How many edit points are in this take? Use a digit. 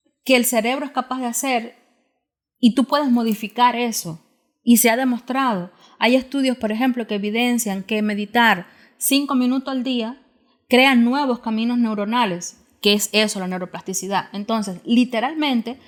0